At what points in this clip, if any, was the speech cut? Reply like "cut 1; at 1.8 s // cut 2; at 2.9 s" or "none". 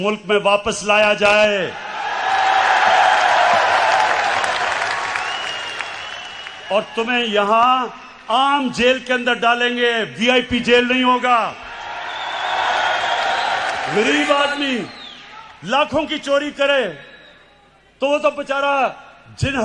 none